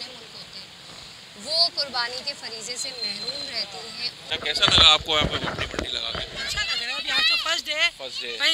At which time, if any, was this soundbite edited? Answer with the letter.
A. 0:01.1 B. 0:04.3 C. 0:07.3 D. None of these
B